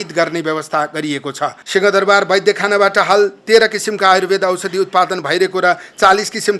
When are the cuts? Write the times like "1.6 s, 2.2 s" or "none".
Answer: 1.6 s